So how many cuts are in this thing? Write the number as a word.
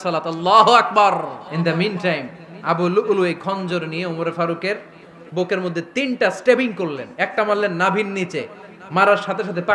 one